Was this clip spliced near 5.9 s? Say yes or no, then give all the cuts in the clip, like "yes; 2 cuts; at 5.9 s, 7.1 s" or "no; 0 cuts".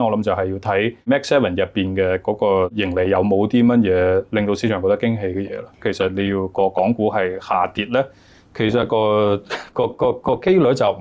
yes; 3 cuts; at 1.1 s, 2.8 s, 5.9 s